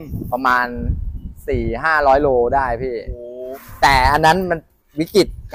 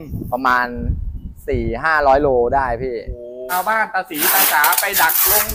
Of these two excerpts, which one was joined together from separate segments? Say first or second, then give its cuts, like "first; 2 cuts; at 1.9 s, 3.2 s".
second; 1 cut; at 3.4 s